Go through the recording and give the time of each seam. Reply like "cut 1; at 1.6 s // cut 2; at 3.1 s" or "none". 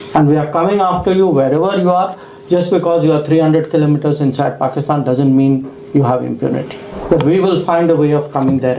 cut 1; at 6.9 s